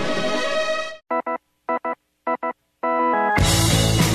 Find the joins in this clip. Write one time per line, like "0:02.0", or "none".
0:00.9

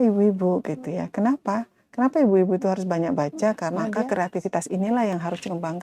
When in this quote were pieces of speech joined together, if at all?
0:03.9

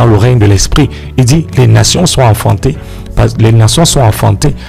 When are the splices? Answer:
none

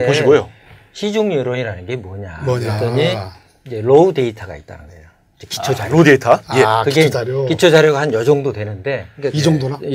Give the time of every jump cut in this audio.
0:05.2

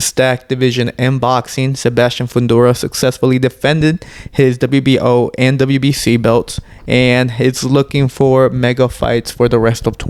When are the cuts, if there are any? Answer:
none

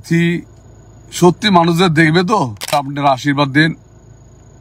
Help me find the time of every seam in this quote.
0:02.7

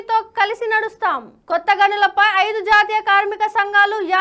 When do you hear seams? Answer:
none

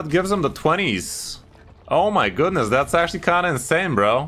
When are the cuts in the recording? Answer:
none

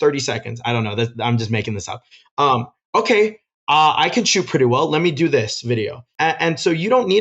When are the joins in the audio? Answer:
0:06.0

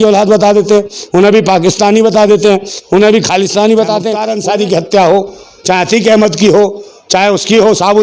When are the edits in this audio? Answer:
0:04.3

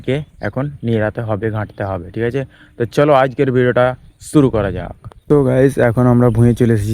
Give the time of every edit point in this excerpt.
none

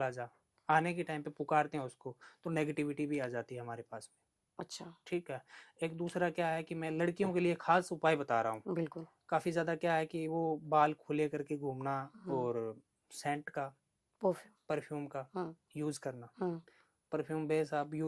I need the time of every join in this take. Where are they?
none

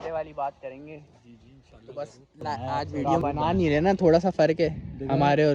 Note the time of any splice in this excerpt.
0:03.0

